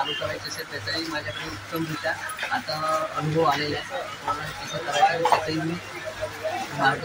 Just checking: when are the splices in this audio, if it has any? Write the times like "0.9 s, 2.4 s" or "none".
none